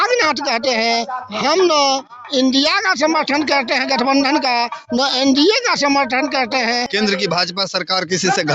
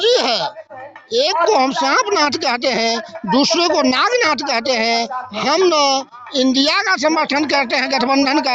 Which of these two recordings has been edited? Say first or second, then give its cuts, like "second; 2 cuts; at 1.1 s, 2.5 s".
first; 1 cut; at 6.9 s